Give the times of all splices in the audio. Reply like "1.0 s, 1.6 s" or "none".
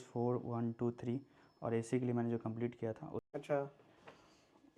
3.3 s